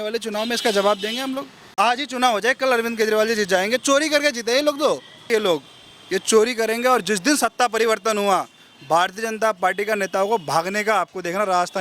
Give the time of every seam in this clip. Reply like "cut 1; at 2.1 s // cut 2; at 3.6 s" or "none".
cut 1; at 1.7 s // cut 2; at 5.3 s